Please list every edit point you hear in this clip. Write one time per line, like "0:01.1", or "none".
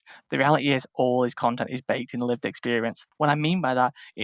0:03.0